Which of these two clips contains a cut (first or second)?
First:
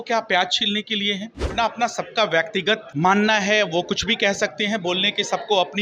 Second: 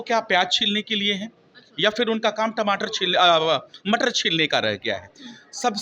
first